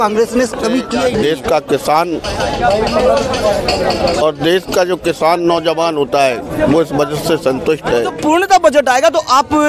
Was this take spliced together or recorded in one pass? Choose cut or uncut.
cut